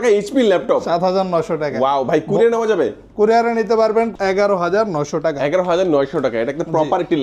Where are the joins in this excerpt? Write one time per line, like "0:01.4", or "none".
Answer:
0:04.1